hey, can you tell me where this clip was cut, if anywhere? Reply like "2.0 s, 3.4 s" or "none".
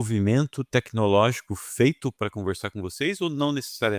none